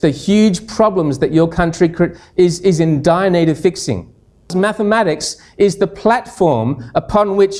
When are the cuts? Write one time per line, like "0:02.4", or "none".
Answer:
0:04.5